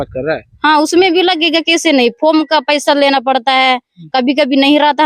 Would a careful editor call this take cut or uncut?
uncut